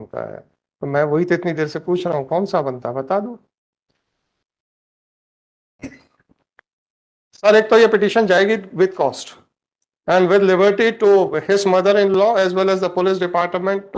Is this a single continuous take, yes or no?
yes